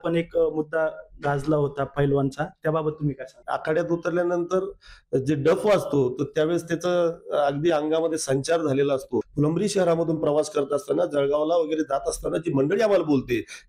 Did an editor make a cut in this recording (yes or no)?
yes